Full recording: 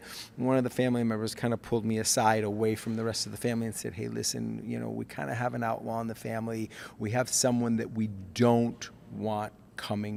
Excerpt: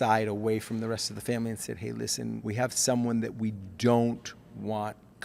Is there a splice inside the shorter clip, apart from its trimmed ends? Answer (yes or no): yes